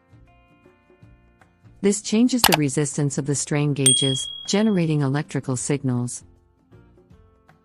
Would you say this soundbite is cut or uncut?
cut